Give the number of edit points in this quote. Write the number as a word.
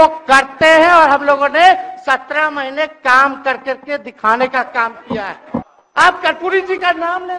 one